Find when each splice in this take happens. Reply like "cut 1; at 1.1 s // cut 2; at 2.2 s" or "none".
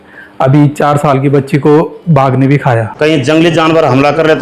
cut 1; at 2.9 s